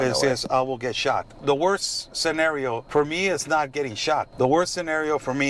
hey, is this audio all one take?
no; 3 cuts; at 1.3 s, 2.8 s, 4.3 s

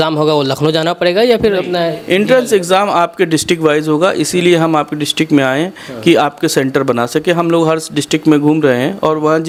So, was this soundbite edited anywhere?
no; 0 cuts

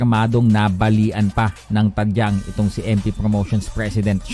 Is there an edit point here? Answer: no; 0 cuts

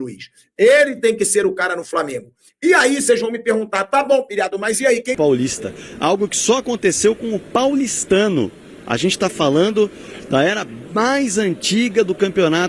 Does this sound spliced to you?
yes; 1 cut; at 5.2 s

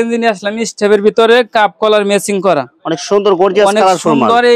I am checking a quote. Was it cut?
no; 0 cuts

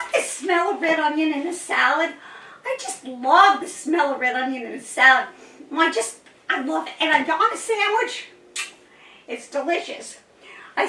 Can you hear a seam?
no; 0 cuts

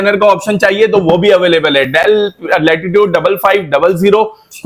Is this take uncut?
yes; 0 cuts

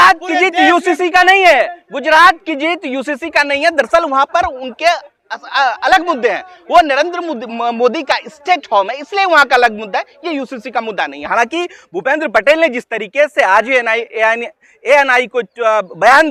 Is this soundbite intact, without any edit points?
yes; 0 cuts

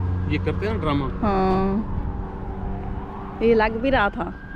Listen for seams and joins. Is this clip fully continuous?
yes; 0 cuts

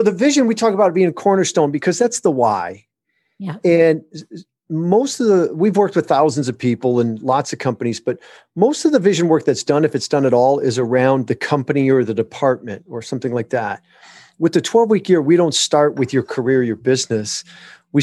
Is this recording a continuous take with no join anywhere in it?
yes; 0 cuts

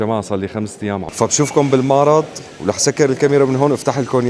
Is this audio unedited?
no; 1 cut; at 1.1 s

